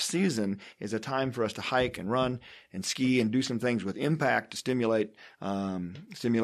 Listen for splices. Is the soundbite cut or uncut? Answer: uncut